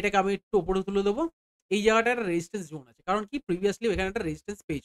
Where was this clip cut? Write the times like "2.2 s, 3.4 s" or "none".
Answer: none